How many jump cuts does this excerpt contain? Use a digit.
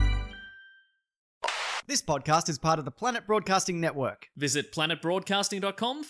1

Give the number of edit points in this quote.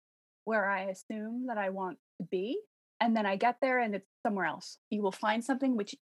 2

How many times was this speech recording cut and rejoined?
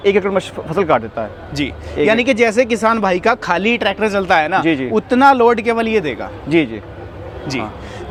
0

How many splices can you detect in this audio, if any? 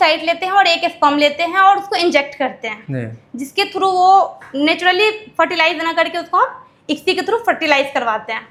0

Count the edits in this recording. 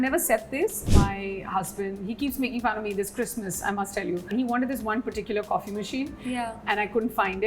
2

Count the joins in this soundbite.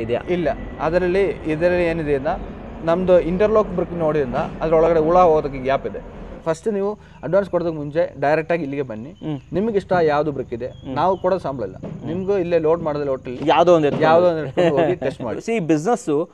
2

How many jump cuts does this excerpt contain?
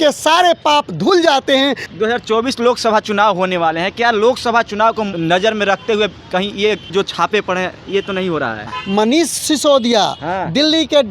4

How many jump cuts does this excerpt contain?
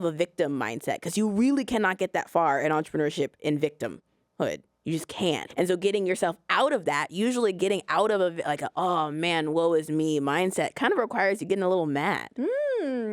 2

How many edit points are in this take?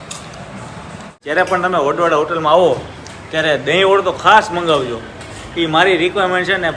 1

